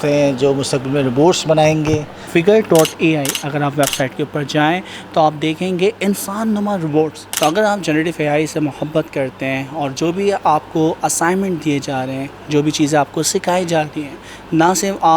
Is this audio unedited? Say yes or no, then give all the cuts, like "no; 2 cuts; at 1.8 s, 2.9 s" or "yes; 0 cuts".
no; 2 cuts; at 2.1 s, 7.2 s